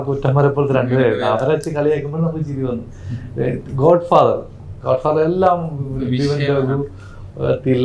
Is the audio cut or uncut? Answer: uncut